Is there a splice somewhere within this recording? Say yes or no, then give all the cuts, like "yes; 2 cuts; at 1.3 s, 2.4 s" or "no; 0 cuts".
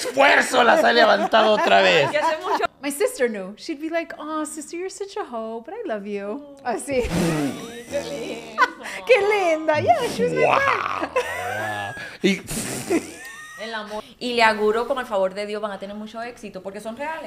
yes; 2 cuts; at 2.7 s, 14.0 s